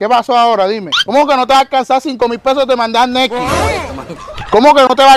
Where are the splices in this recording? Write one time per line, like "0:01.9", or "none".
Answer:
0:00.9